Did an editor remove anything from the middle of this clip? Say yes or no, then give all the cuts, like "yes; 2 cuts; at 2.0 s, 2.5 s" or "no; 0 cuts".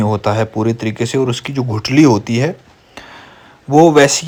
no; 0 cuts